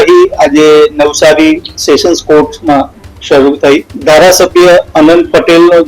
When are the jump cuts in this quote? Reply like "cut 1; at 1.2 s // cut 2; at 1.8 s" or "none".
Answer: cut 1; at 3.9 s